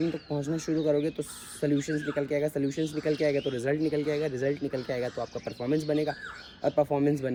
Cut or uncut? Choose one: uncut